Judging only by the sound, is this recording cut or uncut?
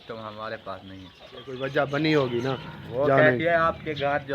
cut